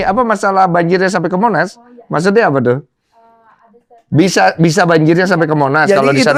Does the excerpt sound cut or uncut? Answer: uncut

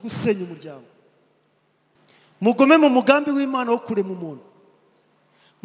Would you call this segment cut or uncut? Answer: cut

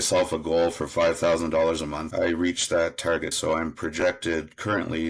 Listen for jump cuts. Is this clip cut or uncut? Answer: cut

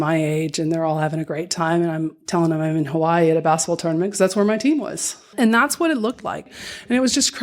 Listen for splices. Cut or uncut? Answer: cut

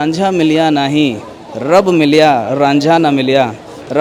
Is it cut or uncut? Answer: uncut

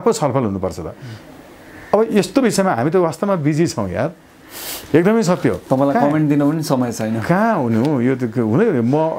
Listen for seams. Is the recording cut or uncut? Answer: uncut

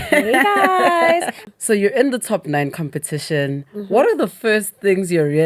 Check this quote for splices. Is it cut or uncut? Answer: cut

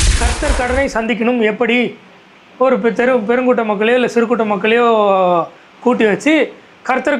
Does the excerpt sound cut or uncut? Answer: uncut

